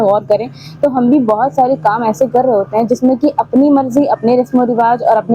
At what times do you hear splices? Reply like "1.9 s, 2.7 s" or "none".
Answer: none

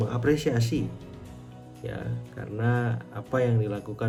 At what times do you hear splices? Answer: none

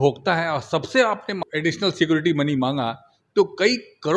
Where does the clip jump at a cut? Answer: 1.4 s

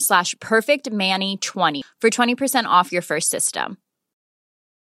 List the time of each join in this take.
1.8 s

